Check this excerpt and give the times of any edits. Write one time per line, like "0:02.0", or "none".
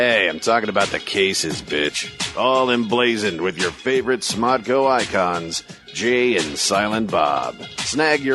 none

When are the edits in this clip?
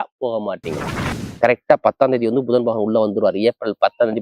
0:01.2

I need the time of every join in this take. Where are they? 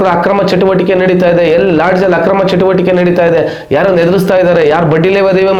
none

